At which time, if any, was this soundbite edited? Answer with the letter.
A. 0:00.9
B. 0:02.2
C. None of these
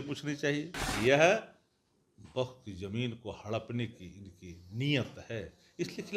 A